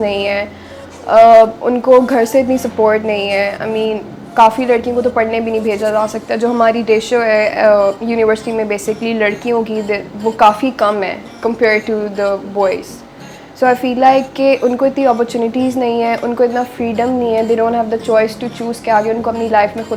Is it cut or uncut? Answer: uncut